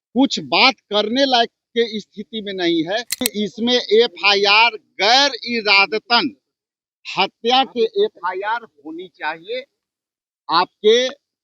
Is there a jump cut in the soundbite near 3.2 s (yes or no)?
yes